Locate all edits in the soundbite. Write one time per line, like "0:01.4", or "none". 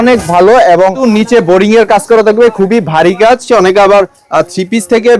0:01.0
0:03.4